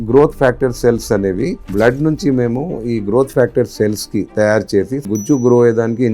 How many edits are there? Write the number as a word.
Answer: two